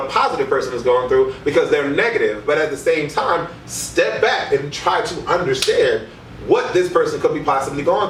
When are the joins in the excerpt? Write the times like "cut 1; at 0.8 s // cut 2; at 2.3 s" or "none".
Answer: none